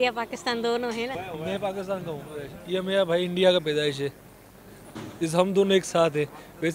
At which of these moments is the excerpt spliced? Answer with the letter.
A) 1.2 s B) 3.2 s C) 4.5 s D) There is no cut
A